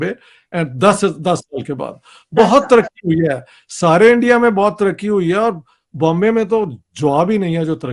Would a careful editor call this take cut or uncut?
uncut